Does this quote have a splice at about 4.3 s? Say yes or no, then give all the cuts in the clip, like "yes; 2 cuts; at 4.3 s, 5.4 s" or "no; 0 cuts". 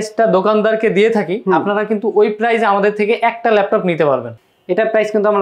yes; 1 cut; at 4.3 s